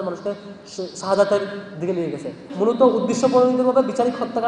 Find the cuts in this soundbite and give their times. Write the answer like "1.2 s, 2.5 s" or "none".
2.4 s